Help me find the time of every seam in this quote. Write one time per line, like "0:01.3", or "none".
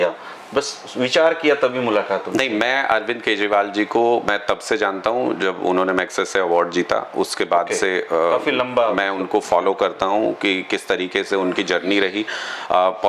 none